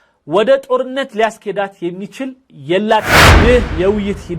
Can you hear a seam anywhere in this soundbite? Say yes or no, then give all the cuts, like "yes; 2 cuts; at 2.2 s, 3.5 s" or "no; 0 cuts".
yes; 1 cut; at 3.2 s